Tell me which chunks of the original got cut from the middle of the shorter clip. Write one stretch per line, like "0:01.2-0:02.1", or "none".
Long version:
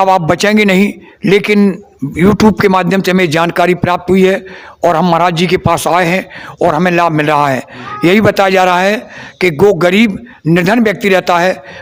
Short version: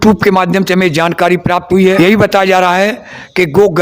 0:04.3-0:08.0